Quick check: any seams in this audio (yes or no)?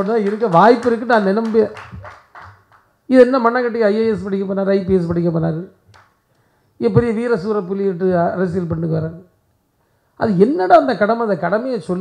no